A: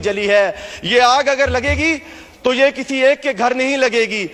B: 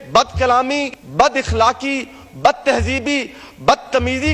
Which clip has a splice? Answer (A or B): B